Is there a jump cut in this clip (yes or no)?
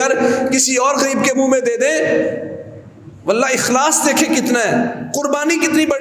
no